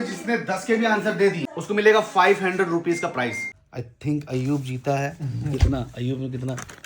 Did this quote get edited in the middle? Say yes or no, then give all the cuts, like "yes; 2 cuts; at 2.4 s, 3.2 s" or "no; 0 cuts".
yes; 2 cuts; at 1.5 s, 3.5 s